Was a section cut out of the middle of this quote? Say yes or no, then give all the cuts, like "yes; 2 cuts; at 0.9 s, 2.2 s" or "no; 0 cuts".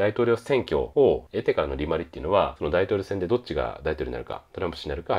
yes; 2 cuts; at 1.0 s, 2.6 s